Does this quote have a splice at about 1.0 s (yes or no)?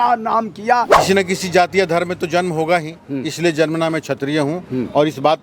yes